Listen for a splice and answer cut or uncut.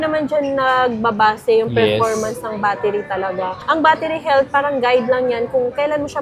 uncut